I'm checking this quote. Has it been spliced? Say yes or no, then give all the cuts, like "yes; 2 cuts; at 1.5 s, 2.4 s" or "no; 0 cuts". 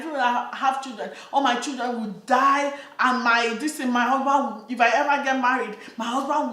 no; 0 cuts